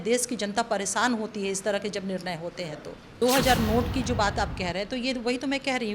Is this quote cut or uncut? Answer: cut